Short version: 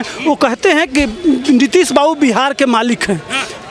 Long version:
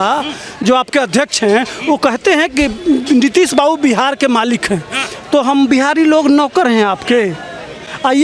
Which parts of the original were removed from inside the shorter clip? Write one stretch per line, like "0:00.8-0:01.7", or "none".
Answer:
none